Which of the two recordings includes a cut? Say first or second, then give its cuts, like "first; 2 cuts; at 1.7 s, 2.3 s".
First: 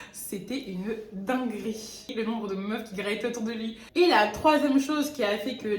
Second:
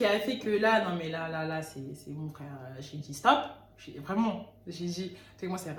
first; 2 cuts; at 2.1 s, 3.8 s